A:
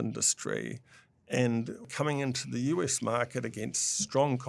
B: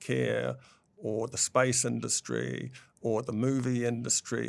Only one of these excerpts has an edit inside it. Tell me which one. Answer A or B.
A